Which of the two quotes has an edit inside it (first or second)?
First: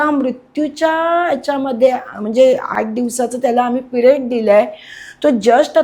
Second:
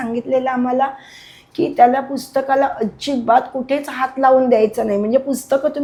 first